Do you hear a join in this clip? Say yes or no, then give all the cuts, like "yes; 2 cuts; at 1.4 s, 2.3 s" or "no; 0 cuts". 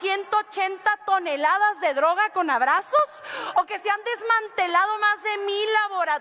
no; 0 cuts